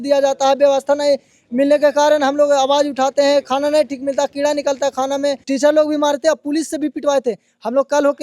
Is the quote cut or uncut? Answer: cut